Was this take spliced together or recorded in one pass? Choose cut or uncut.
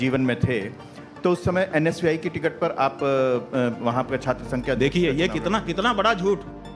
uncut